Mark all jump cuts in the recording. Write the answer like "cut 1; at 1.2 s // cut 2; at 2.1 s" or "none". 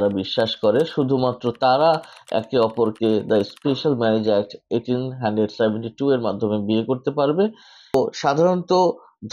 cut 1; at 7.9 s